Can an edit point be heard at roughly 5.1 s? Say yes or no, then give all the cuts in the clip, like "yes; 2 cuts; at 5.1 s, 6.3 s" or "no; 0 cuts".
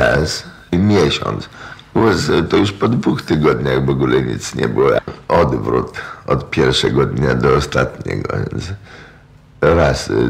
yes; 1 cut; at 5.1 s